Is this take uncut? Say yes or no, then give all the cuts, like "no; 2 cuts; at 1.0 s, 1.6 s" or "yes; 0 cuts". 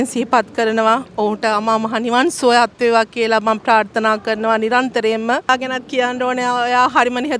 no; 1 cut; at 5.5 s